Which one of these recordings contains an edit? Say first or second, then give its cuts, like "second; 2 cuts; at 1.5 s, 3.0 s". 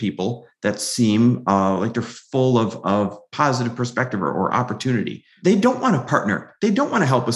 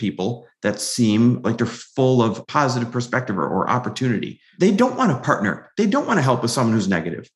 second; 2 cuts; at 1.4 s, 2.4 s